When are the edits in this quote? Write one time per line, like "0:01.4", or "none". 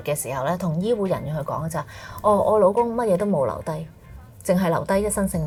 none